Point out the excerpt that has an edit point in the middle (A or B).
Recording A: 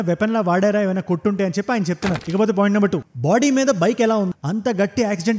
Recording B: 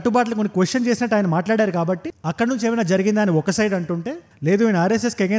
A